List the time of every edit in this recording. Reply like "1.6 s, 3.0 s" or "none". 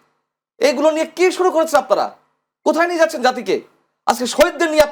none